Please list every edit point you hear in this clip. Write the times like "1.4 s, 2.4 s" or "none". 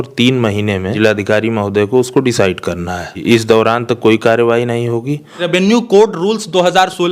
0.9 s, 3.2 s, 5.5 s

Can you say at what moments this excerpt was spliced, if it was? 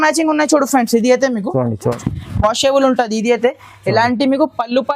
2.0 s

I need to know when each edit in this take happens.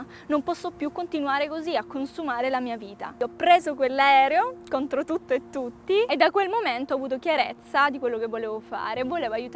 3.2 s, 6.1 s

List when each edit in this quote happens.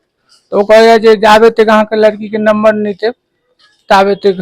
none

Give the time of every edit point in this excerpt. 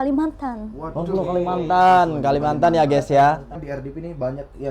3.6 s

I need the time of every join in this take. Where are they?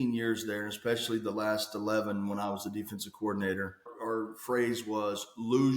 3.9 s

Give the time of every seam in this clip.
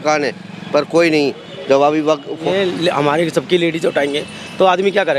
2.4 s

